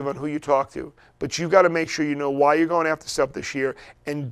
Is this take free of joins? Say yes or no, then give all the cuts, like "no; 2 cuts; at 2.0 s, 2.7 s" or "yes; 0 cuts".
yes; 0 cuts